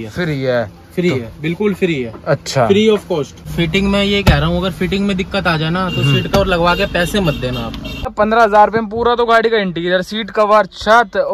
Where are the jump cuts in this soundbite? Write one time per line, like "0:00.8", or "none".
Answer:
0:03.5
0:08.1